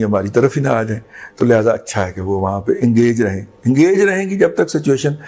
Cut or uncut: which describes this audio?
uncut